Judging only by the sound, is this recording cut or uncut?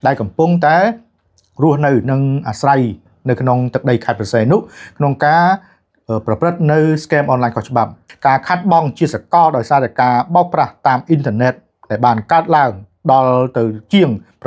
cut